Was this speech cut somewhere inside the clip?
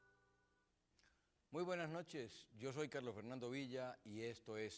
yes; 1 cut; at 1.3 s

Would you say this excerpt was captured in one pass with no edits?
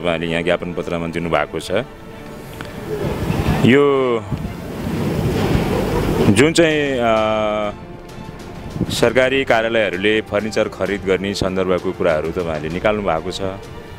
yes; 0 cuts

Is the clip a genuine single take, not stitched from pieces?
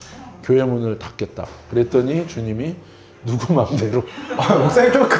yes; 0 cuts

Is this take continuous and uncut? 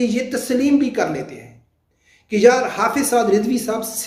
yes; 0 cuts

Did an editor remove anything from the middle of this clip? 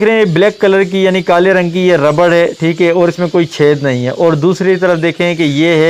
no; 0 cuts

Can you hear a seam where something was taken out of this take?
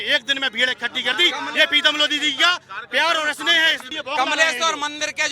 yes; 1 cut; at 3.9 s

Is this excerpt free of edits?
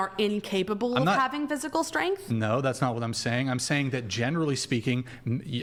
yes; 0 cuts

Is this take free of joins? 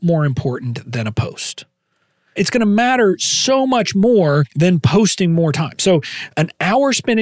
no; 3 cuts; at 2.4 s, 4.5 s, 6.2 s

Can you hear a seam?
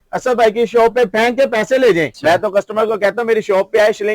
yes; 1 cut; at 2.1 s

